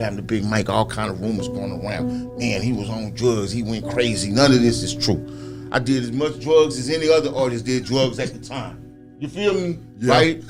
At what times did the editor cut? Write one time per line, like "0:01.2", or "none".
none